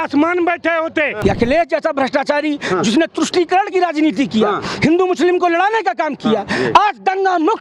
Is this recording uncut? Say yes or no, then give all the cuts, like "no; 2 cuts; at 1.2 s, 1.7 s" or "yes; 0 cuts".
no; 1 cut; at 1.2 s